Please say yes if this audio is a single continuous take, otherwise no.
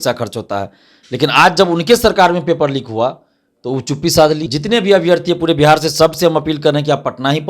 no